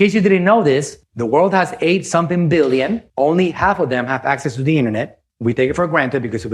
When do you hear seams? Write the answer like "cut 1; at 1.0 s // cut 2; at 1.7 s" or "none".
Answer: none